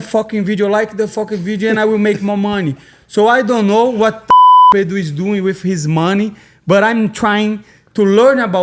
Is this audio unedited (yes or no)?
yes